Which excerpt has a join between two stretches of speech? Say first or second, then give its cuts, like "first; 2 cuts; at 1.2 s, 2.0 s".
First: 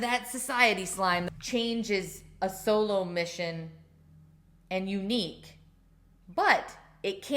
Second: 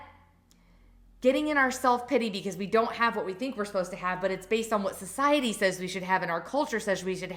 first; 1 cut; at 1.2 s